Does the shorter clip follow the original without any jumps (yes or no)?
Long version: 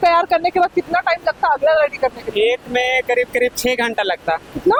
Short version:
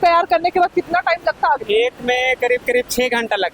no